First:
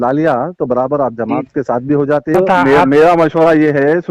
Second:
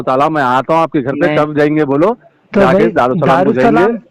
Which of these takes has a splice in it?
first; 1 cut; at 2.3 s

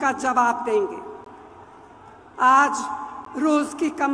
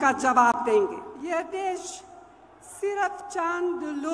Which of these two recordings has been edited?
second; 1 cut; at 1.1 s

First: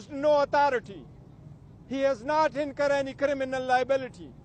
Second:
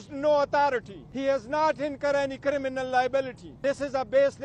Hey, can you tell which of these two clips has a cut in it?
second; 2 cuts; at 1.0 s, 3.4 s

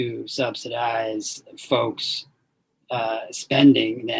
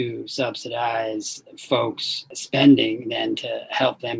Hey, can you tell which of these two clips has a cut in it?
second; 1 cut; at 2.4 s

